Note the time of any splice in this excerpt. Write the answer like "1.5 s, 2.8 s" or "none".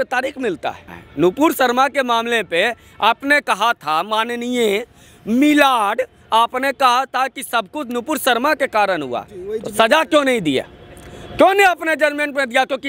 1.0 s